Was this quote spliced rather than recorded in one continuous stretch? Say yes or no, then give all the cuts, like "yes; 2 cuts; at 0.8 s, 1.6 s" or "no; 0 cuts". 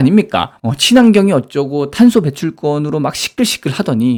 no; 0 cuts